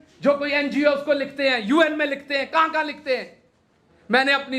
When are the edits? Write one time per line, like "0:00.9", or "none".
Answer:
none